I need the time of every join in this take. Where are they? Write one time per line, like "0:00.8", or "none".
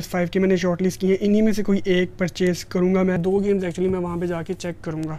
0:03.2